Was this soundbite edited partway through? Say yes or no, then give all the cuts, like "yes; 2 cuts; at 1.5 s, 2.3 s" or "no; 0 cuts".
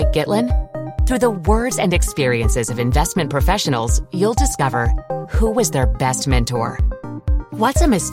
no; 0 cuts